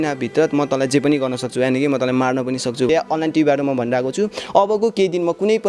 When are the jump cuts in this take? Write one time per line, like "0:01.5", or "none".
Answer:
0:02.9

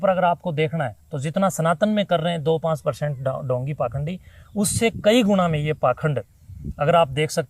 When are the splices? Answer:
none

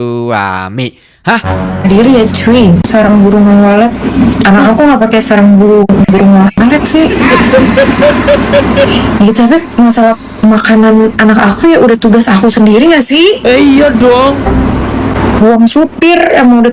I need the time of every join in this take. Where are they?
0:02.9
0:15.2

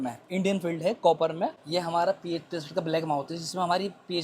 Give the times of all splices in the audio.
0:01.6

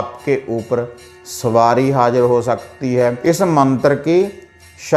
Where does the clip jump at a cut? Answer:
0:03.2

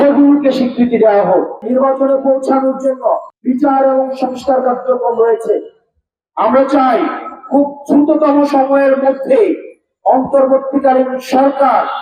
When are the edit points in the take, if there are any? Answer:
0:01.6
0:03.3

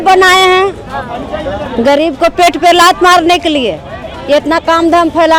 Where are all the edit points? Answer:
none

